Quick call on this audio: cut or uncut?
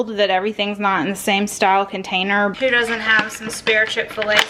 cut